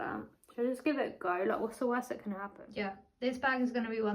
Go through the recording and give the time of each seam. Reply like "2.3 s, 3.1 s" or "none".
3.0 s